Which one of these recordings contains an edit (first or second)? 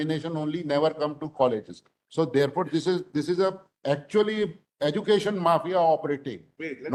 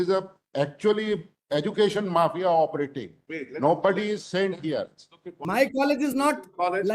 second